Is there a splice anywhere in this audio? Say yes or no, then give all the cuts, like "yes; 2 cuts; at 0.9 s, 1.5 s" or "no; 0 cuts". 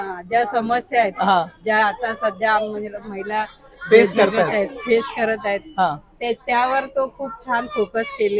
no; 0 cuts